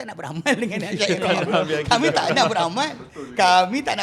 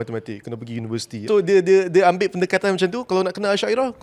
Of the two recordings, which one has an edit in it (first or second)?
second